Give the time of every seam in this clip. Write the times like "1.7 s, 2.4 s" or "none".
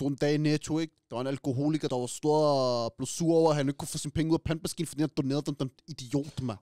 1.9 s